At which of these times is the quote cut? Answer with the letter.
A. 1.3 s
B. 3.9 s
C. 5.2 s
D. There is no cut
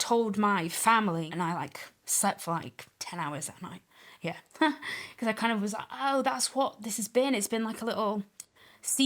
A